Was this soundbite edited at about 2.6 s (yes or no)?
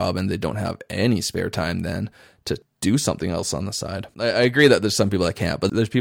no